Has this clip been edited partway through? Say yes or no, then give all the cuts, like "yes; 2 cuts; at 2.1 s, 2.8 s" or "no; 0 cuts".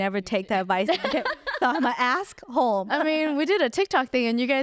yes; 1 cut; at 2.9 s